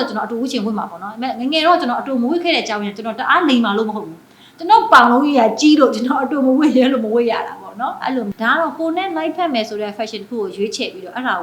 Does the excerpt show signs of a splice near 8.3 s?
yes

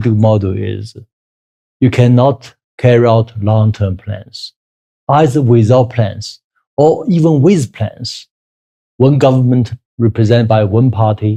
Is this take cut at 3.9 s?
no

